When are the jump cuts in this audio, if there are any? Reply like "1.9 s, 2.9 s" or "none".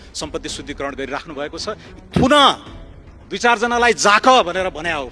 1.8 s